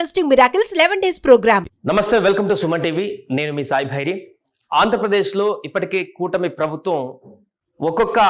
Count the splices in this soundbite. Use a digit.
1